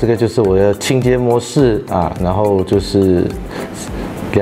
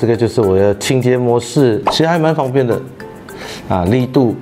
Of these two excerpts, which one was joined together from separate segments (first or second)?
second